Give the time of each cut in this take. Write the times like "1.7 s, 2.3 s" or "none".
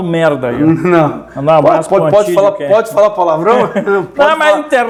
none

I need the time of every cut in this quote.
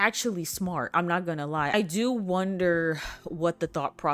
1.7 s

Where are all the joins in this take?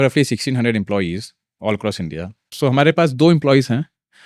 2.5 s

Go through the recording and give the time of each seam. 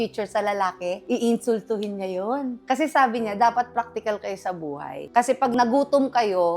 5.5 s

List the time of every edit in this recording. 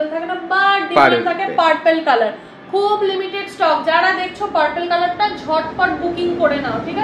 none

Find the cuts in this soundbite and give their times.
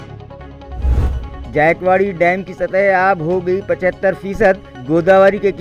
1.0 s

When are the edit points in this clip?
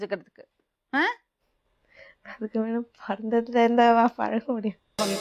none

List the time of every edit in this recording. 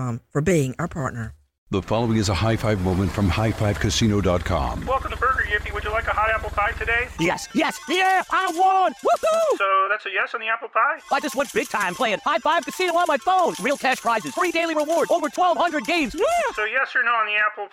1.7 s

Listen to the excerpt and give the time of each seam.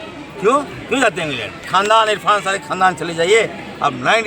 1.8 s

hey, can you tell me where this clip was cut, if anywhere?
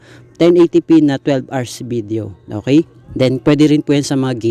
3.0 s

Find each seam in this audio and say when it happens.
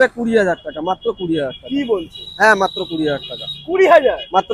none

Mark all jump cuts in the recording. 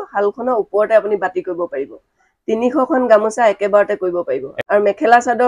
4.6 s

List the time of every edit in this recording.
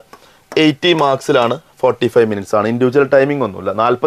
none

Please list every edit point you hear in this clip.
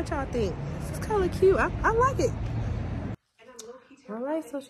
3.1 s

